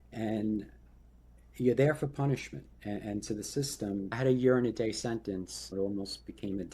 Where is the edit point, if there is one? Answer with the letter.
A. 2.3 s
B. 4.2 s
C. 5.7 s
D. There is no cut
C